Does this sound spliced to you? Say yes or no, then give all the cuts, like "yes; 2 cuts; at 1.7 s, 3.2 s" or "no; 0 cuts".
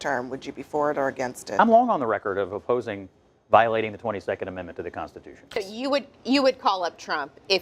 yes; 1 cut; at 5.6 s